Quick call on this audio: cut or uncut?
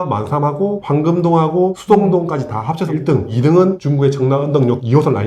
uncut